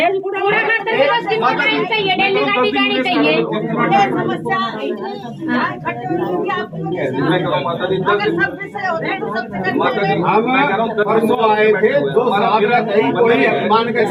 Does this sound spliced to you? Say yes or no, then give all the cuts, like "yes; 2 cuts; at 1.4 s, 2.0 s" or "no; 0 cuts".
no; 0 cuts